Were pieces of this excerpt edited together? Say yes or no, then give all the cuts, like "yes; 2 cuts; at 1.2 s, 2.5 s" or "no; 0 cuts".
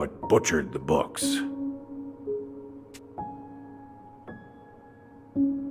yes; 1 cut; at 1.3 s